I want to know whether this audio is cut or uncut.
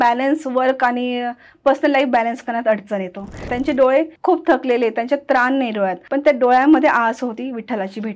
cut